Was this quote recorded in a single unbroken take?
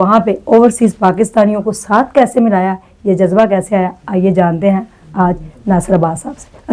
yes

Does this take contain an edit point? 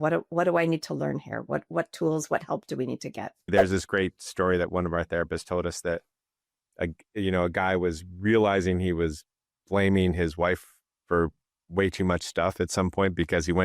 yes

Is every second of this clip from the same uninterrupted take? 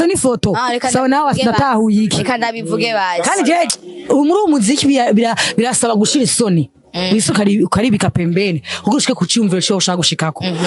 no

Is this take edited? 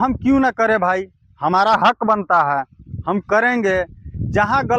no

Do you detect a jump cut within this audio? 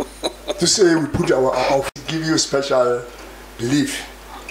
yes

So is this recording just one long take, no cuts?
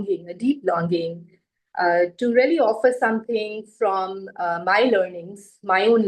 yes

